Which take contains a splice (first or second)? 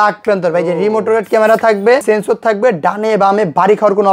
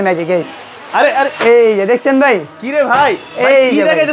first